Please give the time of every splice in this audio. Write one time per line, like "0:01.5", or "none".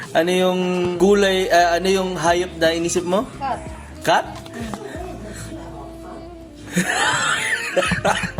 0:00.9

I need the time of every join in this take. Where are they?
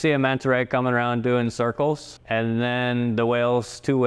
0:02.1

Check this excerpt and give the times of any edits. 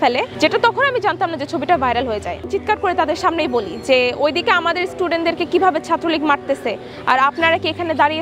0:02.4

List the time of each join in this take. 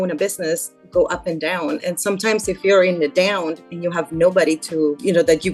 none

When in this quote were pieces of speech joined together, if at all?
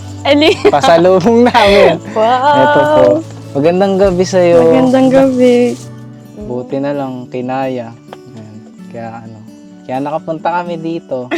0:05.8

